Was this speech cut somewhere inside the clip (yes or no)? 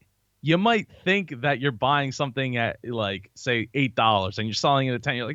no